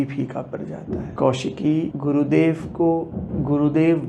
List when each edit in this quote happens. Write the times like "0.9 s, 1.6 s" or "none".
1.1 s, 1.9 s, 3.2 s